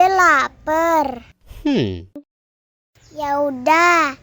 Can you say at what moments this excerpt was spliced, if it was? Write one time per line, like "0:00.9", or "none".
0:01.2
0:02.2